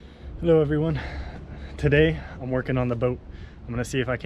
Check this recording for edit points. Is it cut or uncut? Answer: uncut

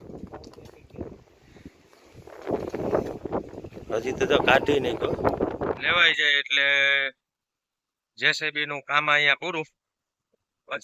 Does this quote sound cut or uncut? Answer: cut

